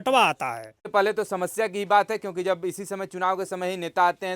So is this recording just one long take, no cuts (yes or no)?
no